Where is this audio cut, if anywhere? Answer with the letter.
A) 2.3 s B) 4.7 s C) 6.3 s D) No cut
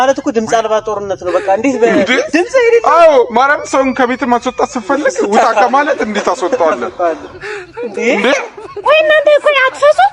D